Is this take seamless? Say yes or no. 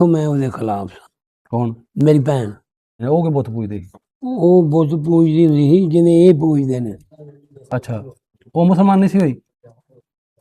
no